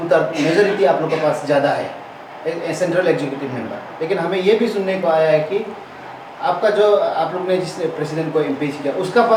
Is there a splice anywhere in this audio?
no; 0 cuts

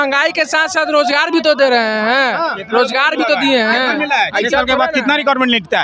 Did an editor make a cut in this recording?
no; 0 cuts

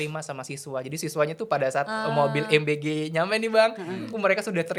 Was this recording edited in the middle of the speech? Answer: no; 0 cuts

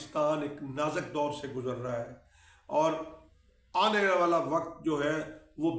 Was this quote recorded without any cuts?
yes; 0 cuts

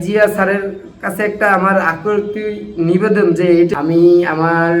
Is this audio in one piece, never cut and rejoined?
no; 1 cut; at 3.7 s

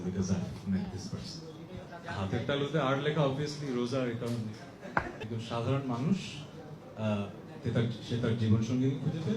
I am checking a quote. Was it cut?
yes; 2 cuts; at 2.0 s, 5.2 s

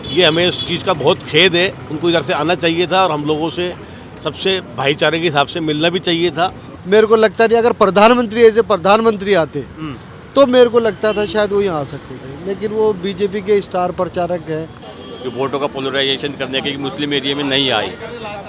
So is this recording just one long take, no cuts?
no; 2 cuts; at 6.7 s, 14.8 s

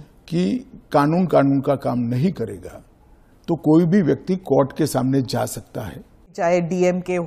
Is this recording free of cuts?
no; 1 cut; at 6.3 s

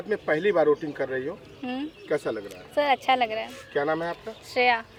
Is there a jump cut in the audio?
no; 0 cuts

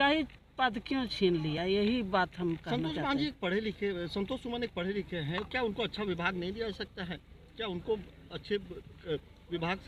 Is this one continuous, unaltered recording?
yes; 0 cuts

